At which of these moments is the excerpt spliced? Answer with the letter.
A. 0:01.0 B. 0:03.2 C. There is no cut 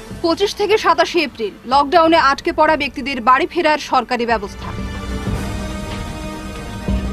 C